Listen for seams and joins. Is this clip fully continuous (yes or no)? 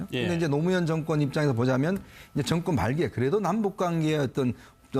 no